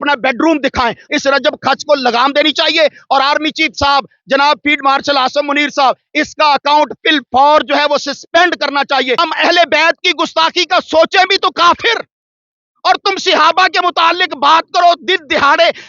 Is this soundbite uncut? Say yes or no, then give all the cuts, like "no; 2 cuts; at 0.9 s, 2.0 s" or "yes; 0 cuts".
no; 2 cuts; at 1.0 s, 9.2 s